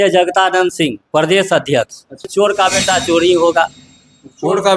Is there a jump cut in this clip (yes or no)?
yes